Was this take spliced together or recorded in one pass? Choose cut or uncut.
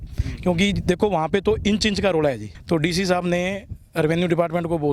cut